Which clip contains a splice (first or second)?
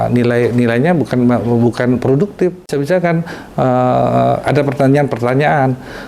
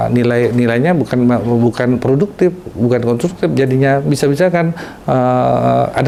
first